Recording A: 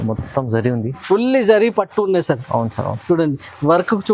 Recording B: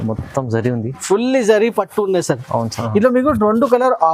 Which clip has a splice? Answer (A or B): B